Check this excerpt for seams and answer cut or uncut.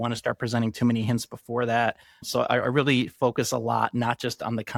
uncut